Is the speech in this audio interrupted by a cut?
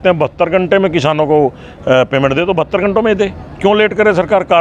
no; 0 cuts

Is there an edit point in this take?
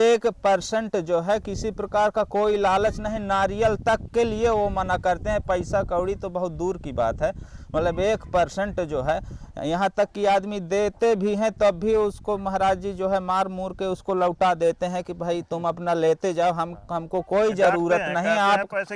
no; 0 cuts

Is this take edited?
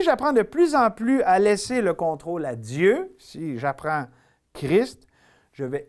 no; 0 cuts

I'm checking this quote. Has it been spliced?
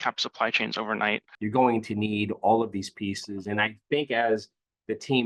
yes; 1 cut; at 1.3 s

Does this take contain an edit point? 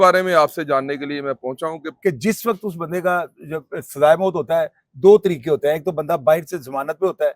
yes; 1 cut; at 1.9 s

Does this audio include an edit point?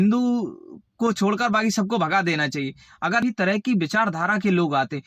yes; 1 cut; at 3.2 s

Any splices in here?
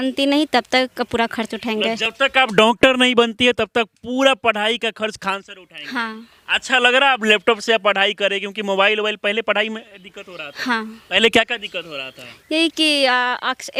no; 0 cuts

